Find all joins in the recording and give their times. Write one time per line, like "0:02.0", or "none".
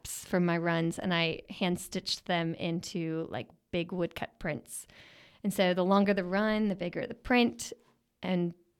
none